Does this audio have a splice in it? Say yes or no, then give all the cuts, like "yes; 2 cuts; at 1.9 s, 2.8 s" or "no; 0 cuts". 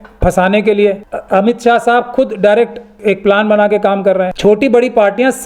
yes; 3 cuts; at 1.1 s, 2.9 s, 4.3 s